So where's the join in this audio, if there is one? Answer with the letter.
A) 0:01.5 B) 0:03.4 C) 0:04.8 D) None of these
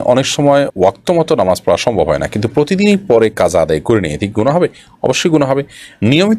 D